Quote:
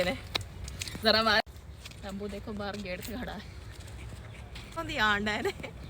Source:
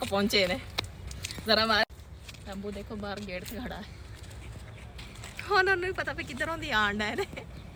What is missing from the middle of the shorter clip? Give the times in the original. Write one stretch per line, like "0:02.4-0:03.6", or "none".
0:05.2-0:06.5